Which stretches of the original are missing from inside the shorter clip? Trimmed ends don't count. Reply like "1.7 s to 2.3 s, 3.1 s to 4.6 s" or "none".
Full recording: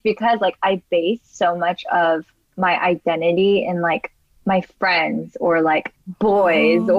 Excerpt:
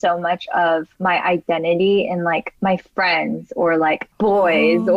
2.3 s to 2.5 s, 4.1 s to 4.3 s, 5.9 s to 6.1 s